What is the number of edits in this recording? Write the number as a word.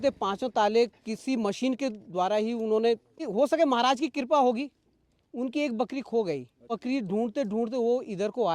two